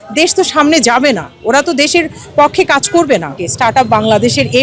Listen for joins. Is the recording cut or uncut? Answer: cut